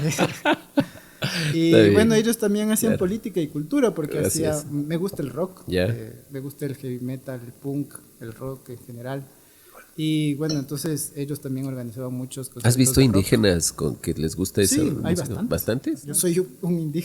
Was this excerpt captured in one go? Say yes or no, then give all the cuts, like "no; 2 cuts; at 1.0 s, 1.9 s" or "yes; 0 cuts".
no; 1 cut; at 16.1 s